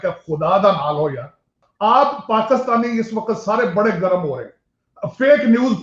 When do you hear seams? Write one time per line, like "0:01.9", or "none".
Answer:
0:01.6